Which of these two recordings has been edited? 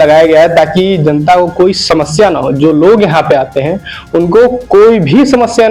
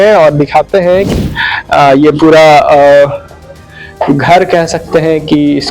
second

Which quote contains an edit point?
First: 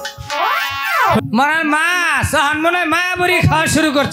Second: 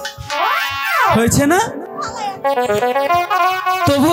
first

